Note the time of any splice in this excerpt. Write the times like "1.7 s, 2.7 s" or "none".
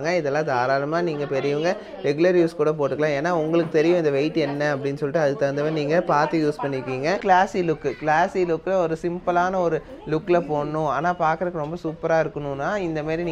7.2 s